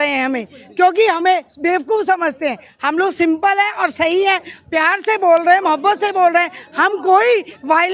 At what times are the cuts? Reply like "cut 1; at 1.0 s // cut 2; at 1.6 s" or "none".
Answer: none